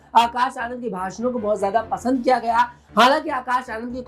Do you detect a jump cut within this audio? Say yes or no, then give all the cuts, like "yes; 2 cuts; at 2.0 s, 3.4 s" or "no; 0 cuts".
no; 0 cuts